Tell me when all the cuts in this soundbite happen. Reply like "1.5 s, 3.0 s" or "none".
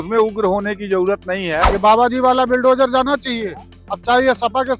1.7 s